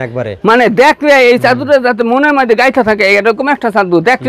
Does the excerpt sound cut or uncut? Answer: uncut